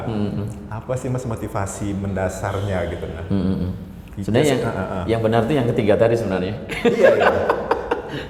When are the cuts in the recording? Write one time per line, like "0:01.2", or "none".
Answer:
none